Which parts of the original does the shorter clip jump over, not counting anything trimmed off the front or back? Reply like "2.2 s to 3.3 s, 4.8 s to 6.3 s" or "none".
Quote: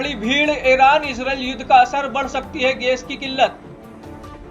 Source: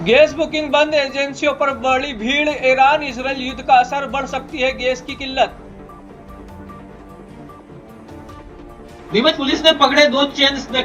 5.6 s to 7.6 s